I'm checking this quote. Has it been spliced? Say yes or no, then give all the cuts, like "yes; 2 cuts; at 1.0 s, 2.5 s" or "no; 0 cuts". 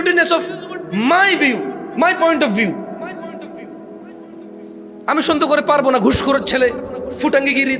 no; 0 cuts